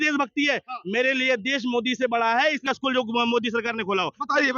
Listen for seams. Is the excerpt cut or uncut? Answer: cut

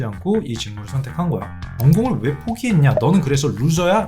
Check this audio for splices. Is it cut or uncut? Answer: cut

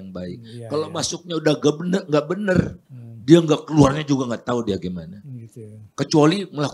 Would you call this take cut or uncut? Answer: uncut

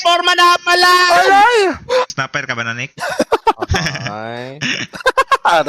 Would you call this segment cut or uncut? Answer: cut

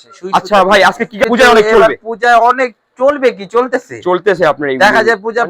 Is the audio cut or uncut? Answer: cut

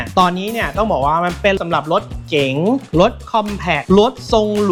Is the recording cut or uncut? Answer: uncut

